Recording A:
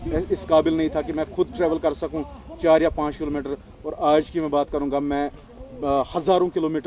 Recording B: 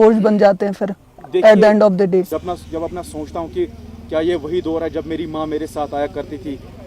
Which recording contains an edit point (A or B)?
B